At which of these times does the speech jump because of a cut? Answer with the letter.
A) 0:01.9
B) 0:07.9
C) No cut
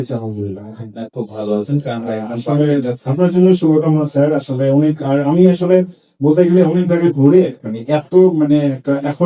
C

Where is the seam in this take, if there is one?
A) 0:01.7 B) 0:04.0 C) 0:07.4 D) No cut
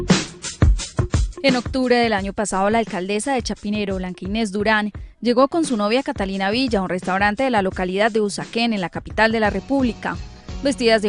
C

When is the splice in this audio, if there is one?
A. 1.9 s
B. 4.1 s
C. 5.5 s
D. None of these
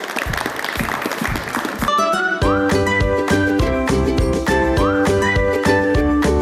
D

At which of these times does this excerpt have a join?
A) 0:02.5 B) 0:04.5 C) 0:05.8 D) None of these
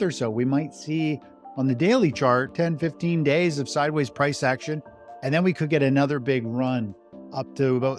A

